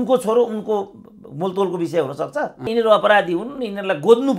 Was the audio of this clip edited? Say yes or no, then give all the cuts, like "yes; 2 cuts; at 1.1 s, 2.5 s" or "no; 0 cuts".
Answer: yes; 1 cut; at 2.7 s